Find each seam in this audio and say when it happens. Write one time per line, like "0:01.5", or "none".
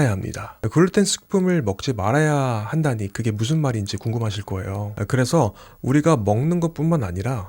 0:04.9